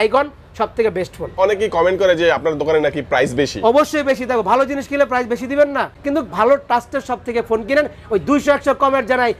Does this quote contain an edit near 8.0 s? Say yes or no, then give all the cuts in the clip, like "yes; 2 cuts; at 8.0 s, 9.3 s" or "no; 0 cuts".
no; 2 cuts; at 1.3 s, 5.9 s